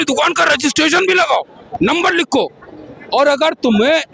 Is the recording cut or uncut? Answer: uncut